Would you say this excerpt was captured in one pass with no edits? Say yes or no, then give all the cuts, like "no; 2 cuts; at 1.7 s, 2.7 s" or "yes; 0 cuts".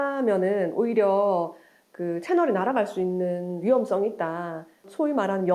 yes; 0 cuts